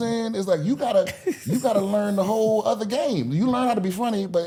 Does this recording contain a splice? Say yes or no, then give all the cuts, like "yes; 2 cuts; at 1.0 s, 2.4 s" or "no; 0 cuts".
no; 0 cuts